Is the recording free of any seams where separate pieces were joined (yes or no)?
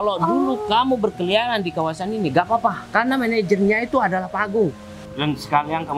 no